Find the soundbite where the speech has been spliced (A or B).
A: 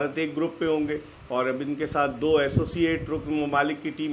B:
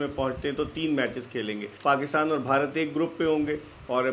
B